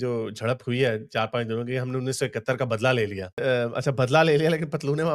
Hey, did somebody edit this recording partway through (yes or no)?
no